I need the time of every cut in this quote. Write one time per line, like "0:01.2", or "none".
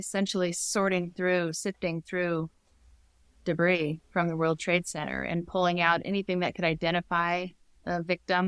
none